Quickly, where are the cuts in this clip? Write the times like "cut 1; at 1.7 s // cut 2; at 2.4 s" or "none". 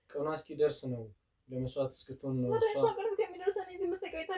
none